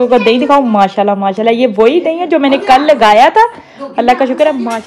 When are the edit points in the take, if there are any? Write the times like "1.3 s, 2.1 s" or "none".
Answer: none